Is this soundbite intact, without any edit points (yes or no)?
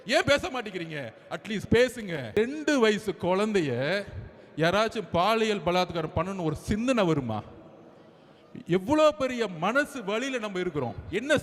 no